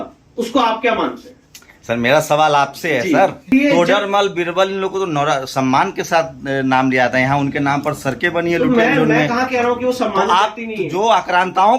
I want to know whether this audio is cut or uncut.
cut